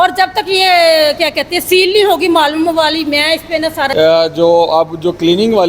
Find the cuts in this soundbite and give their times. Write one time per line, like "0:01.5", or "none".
0:03.9

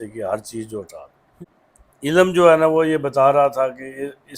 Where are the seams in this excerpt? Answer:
0:01.3

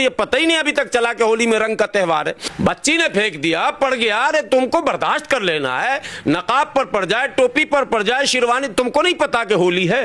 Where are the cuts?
0:02.4

